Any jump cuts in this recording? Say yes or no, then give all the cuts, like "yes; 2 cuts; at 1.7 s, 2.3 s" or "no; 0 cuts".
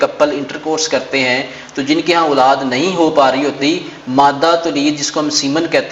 no; 0 cuts